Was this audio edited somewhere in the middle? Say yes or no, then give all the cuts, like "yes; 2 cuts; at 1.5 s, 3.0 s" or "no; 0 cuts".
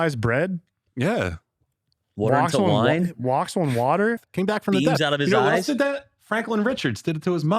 yes; 1 cut; at 4.3 s